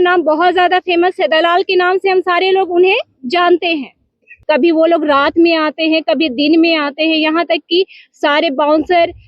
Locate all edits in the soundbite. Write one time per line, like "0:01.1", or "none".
0:04.3